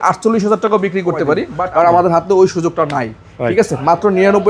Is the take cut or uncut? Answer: cut